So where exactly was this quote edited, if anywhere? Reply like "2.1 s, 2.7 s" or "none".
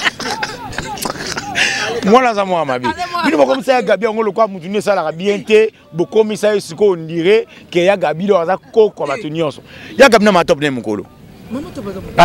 none